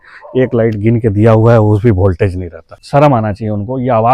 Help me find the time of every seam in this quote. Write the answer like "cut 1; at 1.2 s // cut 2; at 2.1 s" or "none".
cut 1; at 2.7 s